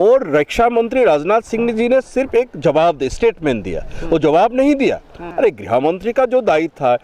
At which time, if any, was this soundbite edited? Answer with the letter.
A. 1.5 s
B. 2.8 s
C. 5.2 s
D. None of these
C